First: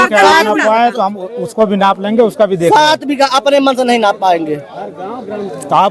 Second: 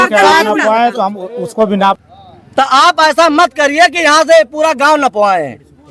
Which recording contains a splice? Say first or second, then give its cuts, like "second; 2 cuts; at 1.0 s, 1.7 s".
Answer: second; 1 cut; at 2.0 s